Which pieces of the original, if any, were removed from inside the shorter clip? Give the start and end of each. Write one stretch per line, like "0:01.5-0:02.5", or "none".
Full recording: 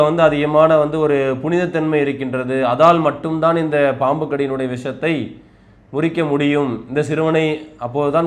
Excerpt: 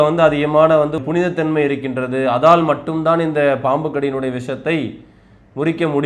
0:01.0-0:01.3